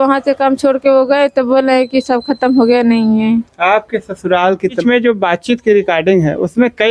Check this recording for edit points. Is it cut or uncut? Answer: cut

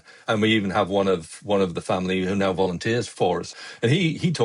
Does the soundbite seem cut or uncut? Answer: cut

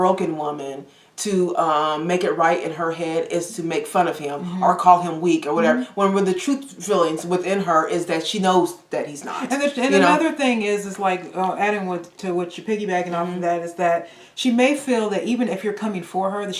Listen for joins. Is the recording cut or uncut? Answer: uncut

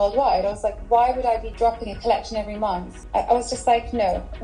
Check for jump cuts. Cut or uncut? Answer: cut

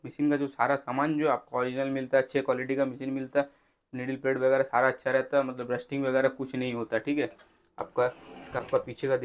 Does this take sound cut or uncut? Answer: uncut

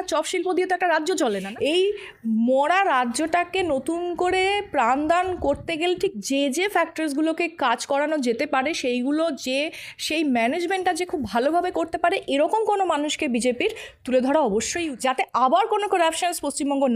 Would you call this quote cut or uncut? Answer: cut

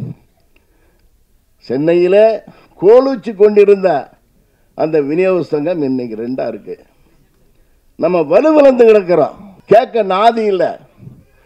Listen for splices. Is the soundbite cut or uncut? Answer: cut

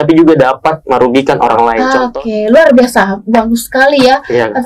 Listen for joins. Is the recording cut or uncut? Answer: cut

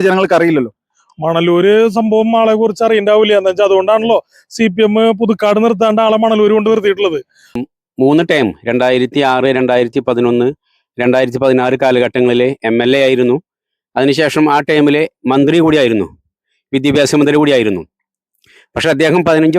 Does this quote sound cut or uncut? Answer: cut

